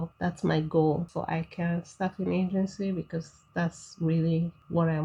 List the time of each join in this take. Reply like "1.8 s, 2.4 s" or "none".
1.1 s